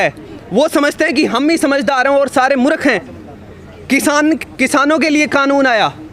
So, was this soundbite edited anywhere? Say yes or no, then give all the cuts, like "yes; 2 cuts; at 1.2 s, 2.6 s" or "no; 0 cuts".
no; 0 cuts